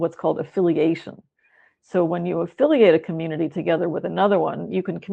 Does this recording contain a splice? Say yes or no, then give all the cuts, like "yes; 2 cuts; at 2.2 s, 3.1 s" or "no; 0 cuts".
no; 0 cuts